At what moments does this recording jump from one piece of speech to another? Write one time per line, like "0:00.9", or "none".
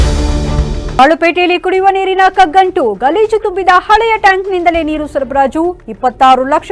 0:00.9